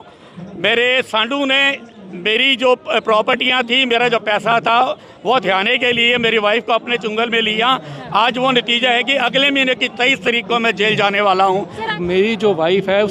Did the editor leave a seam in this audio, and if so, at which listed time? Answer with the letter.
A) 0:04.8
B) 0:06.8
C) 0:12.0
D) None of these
C